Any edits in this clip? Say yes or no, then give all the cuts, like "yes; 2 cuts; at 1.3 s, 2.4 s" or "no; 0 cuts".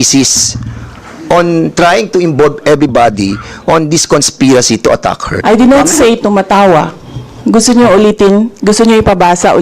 yes; 1 cut; at 5.4 s